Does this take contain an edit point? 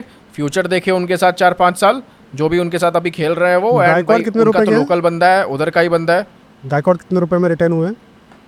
no; 0 cuts

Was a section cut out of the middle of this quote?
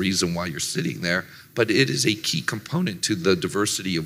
no; 0 cuts

